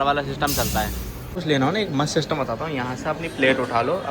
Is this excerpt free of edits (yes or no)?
no